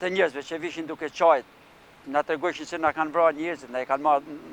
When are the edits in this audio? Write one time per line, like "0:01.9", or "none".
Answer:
none